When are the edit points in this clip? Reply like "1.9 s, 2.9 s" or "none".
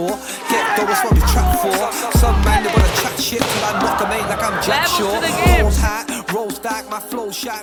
none